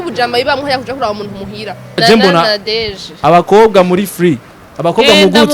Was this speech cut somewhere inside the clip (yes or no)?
yes